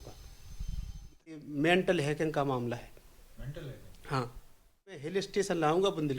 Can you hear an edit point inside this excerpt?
yes; 2 cuts; at 1.4 s, 5.0 s

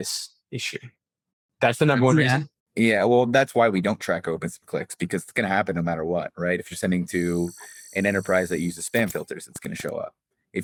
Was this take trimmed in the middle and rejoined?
no; 0 cuts

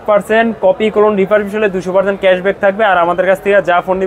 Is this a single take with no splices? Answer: yes; 0 cuts

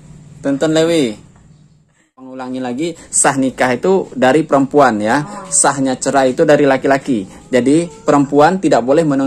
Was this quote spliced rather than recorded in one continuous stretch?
yes; 1 cut; at 2.3 s

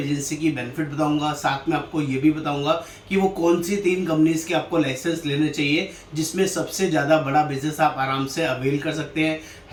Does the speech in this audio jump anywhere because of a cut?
no; 0 cuts

